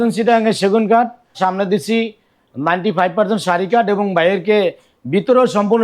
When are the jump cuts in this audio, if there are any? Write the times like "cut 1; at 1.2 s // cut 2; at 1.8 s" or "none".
cut 1; at 1.4 s